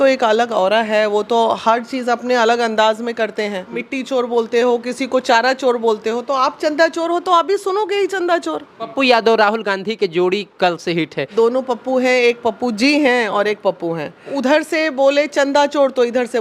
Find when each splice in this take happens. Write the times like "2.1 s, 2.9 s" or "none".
3.8 s, 8.9 s, 11.3 s, 14.3 s